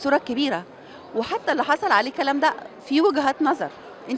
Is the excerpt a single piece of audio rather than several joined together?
yes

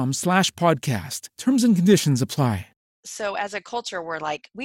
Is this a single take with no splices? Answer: no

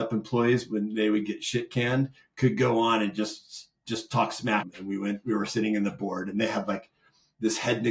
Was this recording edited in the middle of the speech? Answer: yes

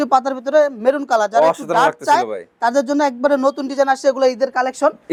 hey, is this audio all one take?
yes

